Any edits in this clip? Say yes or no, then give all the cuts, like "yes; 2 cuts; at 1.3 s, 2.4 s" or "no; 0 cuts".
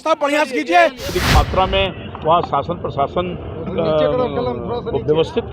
yes; 1 cut; at 1.1 s